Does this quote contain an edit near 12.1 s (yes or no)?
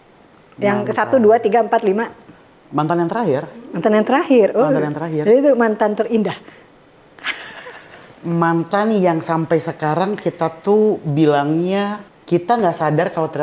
yes